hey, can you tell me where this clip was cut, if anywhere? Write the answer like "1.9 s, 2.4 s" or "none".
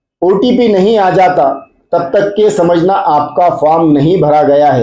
none